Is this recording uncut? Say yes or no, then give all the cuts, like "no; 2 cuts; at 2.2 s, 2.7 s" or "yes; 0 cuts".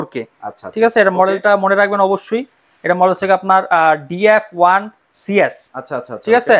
yes; 0 cuts